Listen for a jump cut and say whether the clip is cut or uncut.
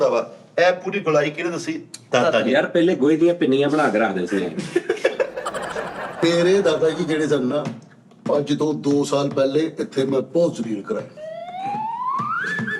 cut